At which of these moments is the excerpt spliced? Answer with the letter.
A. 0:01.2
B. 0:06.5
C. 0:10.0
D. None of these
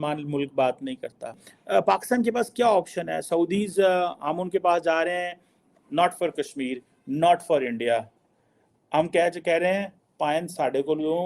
A